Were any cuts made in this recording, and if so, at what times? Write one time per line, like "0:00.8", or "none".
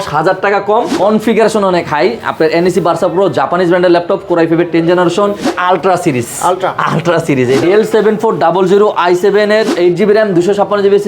0:00.9
0:05.5
0:07.6